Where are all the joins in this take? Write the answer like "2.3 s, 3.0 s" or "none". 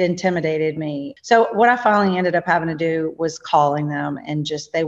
1.1 s